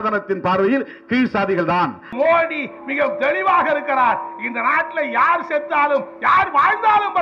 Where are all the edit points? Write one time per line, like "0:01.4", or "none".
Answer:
0:02.1